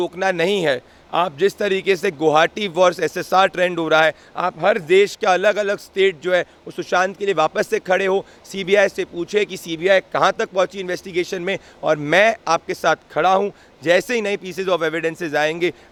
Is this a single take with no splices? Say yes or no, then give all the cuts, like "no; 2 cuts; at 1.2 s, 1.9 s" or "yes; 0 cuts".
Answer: yes; 0 cuts